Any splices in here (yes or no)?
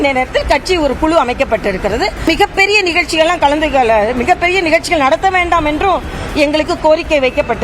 yes